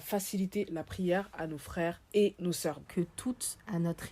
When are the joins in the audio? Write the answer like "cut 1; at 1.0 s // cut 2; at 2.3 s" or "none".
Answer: cut 1; at 2.8 s